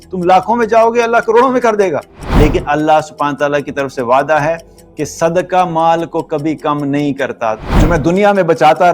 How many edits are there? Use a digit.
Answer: 2